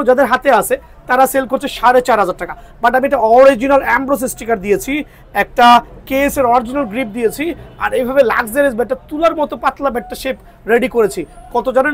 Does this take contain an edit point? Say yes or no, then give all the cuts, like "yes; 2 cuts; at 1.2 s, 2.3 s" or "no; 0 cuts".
no; 0 cuts